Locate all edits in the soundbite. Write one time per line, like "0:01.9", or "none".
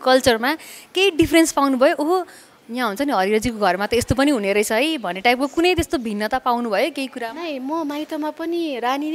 none